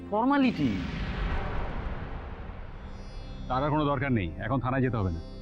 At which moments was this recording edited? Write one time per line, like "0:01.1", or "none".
0:00.9
0:02.5